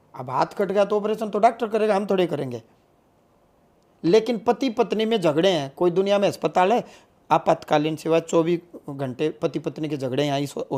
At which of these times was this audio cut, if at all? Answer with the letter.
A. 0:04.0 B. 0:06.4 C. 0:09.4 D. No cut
D